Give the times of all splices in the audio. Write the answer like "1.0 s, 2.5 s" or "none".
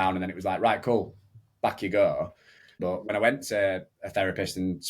2.9 s